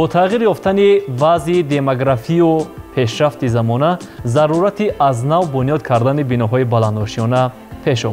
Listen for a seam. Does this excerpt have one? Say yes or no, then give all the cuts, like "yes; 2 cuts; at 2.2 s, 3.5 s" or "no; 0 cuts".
no; 0 cuts